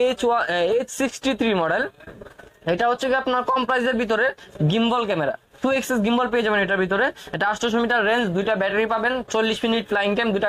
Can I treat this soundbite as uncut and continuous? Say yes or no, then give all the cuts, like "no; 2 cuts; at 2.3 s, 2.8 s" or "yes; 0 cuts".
yes; 0 cuts